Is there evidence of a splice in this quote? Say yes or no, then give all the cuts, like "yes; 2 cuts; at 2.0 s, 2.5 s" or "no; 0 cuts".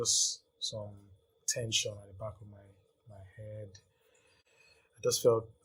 no; 0 cuts